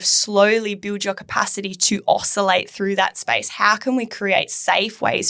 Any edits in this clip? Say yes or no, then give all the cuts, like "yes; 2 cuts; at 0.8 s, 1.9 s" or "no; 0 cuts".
no; 0 cuts